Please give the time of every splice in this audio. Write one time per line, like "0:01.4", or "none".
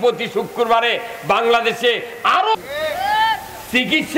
0:02.6